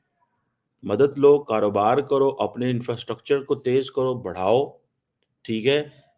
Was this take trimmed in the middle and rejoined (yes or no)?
no